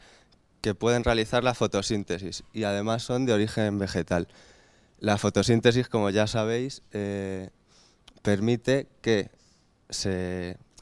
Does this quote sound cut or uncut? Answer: uncut